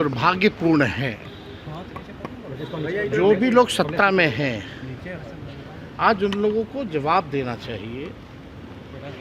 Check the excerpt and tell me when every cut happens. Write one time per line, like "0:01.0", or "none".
none